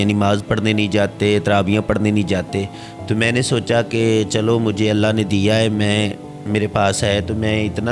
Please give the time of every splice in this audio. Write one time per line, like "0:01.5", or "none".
none